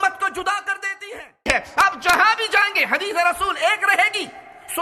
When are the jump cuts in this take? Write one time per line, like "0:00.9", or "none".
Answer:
0:01.3